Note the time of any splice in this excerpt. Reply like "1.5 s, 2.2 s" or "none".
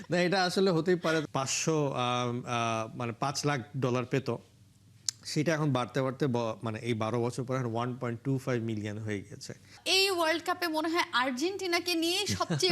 1.2 s, 9.8 s